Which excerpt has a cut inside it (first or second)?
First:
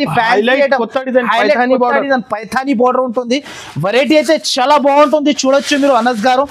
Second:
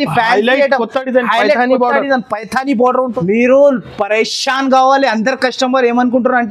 second